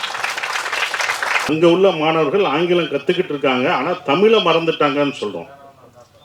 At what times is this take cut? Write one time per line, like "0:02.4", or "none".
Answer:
0:01.5